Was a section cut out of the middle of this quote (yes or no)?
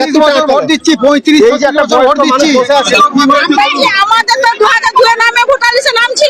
yes